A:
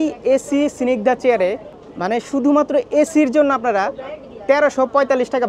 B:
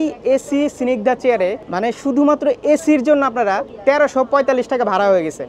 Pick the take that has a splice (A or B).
B